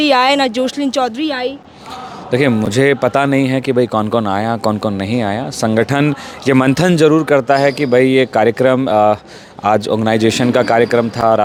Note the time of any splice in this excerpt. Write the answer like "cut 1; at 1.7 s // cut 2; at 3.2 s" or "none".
none